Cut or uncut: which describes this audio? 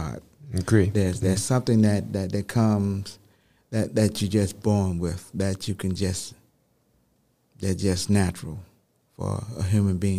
uncut